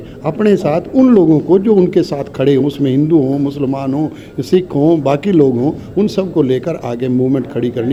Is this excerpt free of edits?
yes; 0 cuts

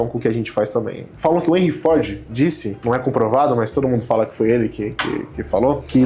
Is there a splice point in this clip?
yes; 2 cuts; at 1.0 s, 2.7 s

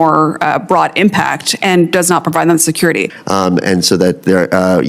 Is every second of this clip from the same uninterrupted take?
no; 1 cut; at 3.1 s

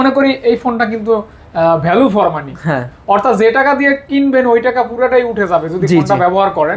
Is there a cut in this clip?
no; 0 cuts

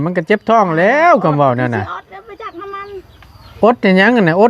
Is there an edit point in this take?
no; 0 cuts

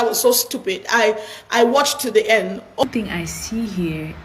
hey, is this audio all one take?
no; 1 cut; at 2.8 s

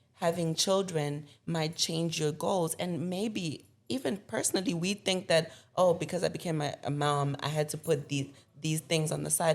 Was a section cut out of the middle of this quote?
no; 0 cuts

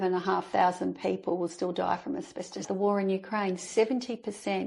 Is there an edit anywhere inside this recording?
yes; 1 cut; at 2.7 s

